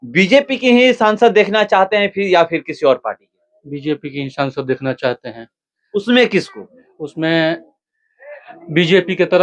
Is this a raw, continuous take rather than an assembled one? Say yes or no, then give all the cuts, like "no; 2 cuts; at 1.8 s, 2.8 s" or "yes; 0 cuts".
yes; 0 cuts